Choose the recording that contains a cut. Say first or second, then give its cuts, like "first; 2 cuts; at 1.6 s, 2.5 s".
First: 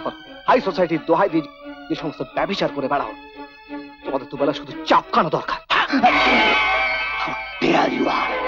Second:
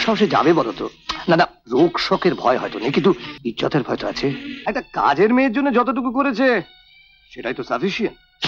second; 2 cuts; at 3.3 s, 4.5 s